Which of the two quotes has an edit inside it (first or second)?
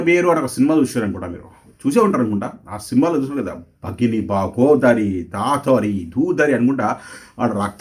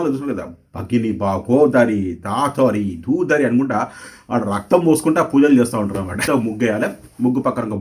second